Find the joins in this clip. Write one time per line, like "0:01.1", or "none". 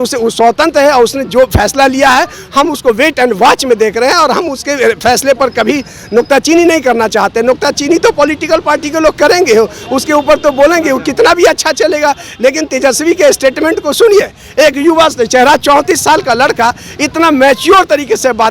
none